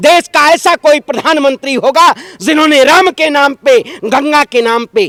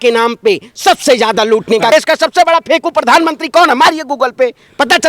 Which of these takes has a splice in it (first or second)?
second